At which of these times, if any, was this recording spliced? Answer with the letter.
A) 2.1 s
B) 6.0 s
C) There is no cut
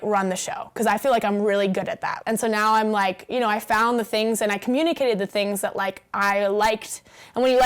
A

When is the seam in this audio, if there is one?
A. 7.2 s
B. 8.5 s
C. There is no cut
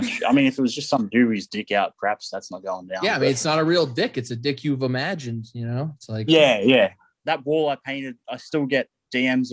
A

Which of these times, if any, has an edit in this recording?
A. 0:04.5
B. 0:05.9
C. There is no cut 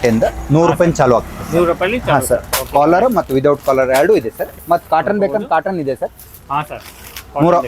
A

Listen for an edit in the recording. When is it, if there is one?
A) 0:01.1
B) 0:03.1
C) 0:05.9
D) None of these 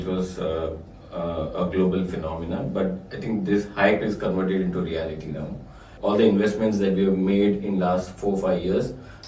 C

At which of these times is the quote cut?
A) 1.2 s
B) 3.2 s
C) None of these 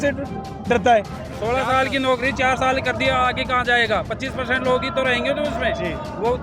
A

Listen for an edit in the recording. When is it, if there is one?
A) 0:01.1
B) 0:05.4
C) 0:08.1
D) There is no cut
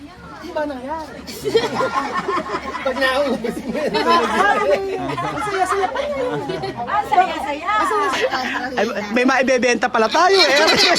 C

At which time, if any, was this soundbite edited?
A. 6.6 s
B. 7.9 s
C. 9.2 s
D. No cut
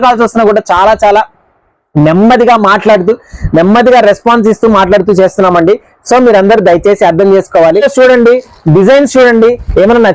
B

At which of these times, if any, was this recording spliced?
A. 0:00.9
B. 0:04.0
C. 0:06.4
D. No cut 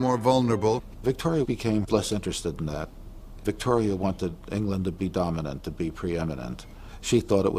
D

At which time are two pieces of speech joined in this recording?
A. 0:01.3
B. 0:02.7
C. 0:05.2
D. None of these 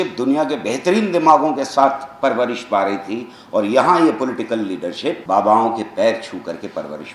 C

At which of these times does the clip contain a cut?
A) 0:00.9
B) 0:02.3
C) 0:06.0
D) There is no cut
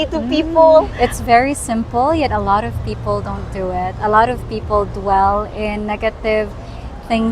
A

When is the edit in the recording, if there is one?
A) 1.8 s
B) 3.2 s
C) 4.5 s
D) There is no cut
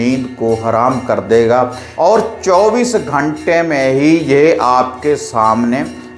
A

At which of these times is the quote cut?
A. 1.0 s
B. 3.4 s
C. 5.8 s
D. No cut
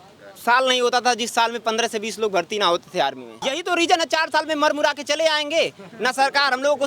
B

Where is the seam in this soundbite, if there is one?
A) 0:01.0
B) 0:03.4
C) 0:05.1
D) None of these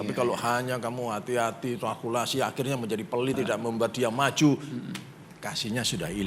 B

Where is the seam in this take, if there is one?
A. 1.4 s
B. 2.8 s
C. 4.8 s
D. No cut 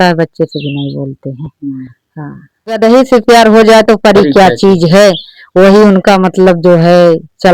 B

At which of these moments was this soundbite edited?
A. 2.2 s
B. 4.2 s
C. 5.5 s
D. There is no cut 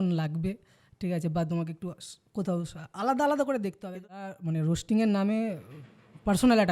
B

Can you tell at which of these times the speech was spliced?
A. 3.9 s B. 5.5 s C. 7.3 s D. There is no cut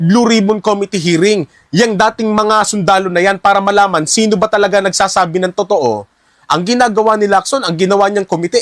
D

